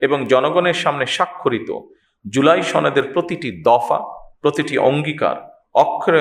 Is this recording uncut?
yes; 0 cuts

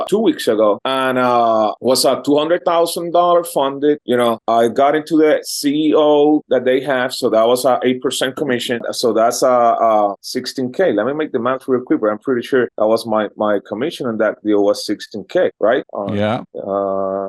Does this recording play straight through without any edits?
yes; 0 cuts

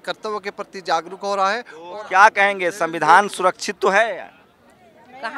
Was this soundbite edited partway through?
yes; 1 cut; at 1.8 s

